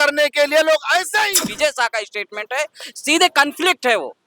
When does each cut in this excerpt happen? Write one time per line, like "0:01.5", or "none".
0:01.5